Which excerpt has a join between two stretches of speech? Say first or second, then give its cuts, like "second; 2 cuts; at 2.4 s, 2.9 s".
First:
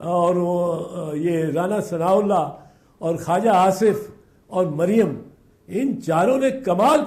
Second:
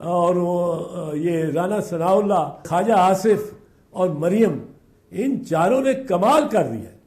second; 1 cut; at 2.6 s